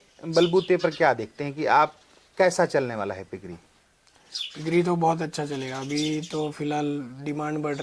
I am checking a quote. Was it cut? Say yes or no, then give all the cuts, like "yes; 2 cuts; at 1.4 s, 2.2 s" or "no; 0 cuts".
no; 0 cuts